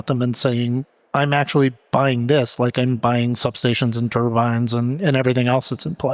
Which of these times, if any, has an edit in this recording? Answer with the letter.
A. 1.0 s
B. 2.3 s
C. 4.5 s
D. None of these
D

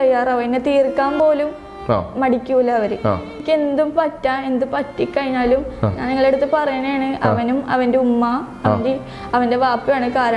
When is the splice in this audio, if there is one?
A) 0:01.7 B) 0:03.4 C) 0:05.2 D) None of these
B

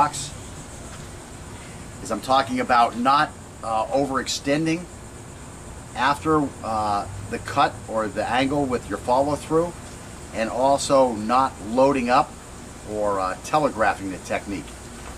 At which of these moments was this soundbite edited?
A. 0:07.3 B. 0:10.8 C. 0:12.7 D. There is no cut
B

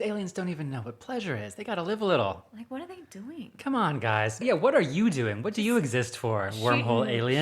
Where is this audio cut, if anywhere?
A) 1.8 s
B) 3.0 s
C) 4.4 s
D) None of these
C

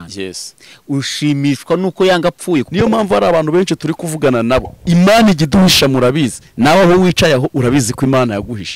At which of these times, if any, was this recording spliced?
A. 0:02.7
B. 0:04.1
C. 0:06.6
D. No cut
A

